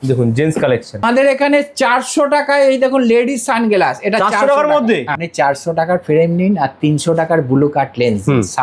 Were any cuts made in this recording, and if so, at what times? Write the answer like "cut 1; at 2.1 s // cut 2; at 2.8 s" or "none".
cut 1; at 1.0 s // cut 2; at 5.2 s